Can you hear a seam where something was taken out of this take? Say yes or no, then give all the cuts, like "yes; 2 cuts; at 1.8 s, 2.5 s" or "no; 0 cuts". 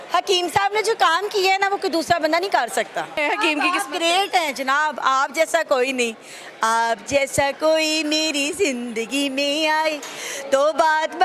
yes; 1 cut; at 3.2 s